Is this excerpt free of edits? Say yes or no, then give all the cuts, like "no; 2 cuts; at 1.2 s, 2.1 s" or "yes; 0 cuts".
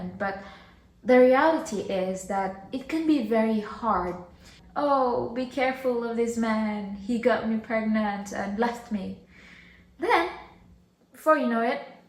no; 1 cut; at 4.6 s